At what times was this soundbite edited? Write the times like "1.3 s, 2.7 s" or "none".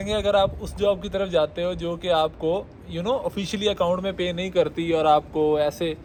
none